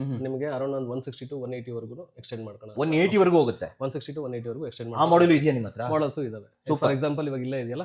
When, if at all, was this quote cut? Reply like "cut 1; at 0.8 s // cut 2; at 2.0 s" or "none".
none